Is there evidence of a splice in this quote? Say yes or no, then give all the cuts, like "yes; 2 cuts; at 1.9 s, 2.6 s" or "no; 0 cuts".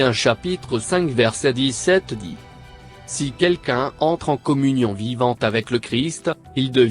no; 0 cuts